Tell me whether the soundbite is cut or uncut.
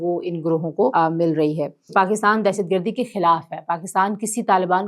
cut